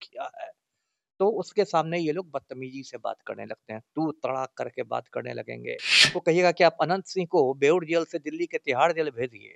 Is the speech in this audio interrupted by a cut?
yes; 1 cut; at 6.1 s

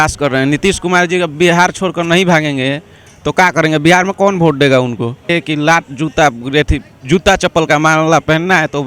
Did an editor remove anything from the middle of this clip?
yes; 1 cut; at 5.3 s

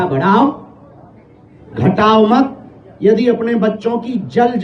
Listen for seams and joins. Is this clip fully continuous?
yes; 0 cuts

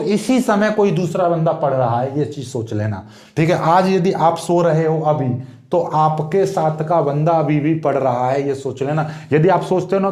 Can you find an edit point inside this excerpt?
no; 0 cuts

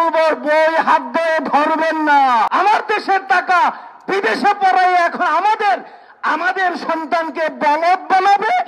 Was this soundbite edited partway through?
yes; 1 cut; at 2.5 s

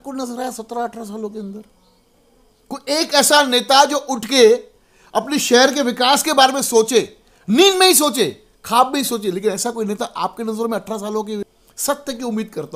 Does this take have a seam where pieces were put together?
yes; 1 cut; at 11.6 s

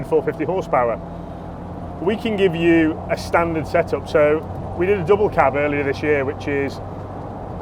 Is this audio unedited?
yes; 0 cuts

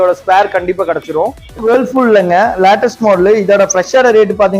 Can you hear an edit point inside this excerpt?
yes; 1 cut; at 1.4 s

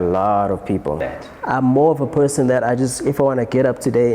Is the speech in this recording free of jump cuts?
no; 1 cut; at 1.1 s

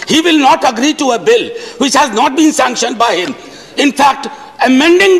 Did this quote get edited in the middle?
no; 0 cuts

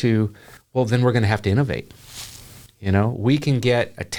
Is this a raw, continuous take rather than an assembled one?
yes; 0 cuts

